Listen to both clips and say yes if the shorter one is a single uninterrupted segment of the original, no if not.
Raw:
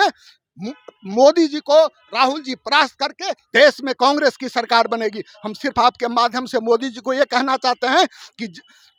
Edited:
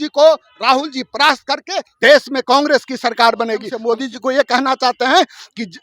no